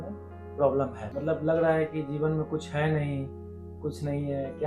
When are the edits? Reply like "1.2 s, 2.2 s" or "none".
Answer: 1.0 s